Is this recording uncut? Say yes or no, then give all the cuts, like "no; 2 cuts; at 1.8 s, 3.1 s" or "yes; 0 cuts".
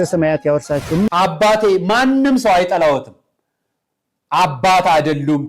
no; 1 cut; at 1.1 s